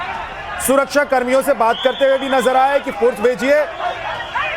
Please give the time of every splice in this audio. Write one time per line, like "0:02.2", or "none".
0:02.2